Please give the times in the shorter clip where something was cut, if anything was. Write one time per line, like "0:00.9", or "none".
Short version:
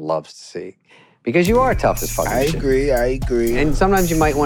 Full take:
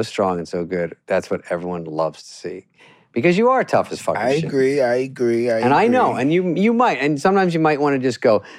0:03.6